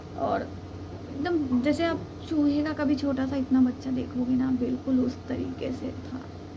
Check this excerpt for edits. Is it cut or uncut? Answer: uncut